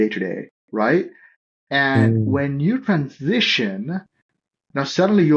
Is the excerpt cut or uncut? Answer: uncut